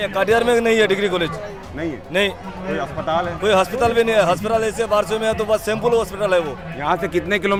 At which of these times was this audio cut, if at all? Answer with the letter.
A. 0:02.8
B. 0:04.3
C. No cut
C